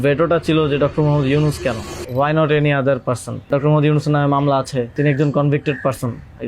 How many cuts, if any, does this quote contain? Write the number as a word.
three